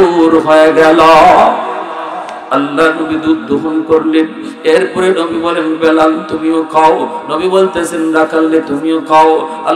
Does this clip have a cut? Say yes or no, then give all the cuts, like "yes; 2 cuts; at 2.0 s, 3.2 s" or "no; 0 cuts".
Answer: no; 0 cuts